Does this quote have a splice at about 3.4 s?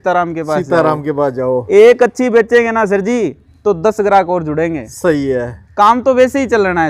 no; 0 cuts

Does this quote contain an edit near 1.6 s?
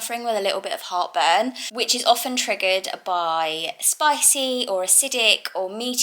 no; 0 cuts

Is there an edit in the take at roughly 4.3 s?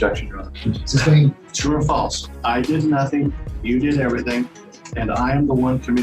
no; 1 cut; at 1.5 s

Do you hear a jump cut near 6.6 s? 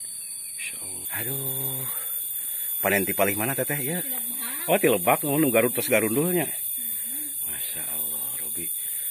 no; 1 cut; at 1.0 s

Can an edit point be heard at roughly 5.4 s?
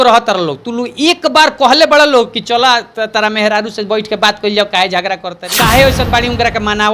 yes; 1 cut; at 5.4 s

